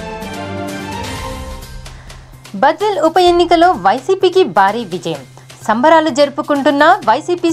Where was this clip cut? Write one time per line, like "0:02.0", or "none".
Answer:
0:01.6